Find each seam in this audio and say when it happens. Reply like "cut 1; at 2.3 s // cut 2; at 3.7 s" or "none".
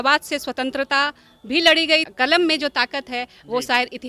cut 1; at 2.1 s